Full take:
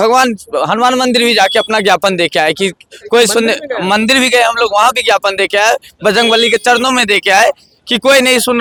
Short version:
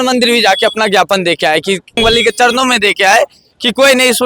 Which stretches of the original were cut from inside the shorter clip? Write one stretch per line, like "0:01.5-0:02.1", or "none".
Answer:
0:02.9-0:06.2